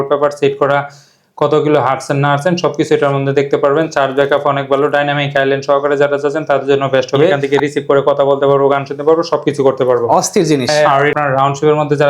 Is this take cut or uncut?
cut